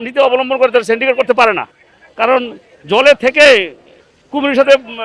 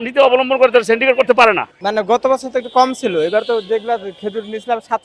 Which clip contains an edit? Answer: second; 1 cut; at 1.7 s

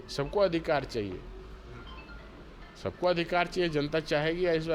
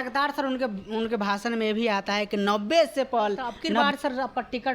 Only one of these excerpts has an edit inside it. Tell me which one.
second; 1 cut; at 3.7 s

